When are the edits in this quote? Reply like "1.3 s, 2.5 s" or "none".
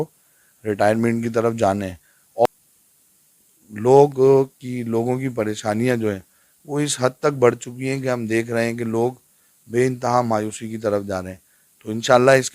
2.5 s